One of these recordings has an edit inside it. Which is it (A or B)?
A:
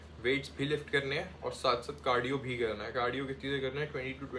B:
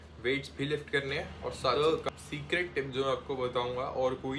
B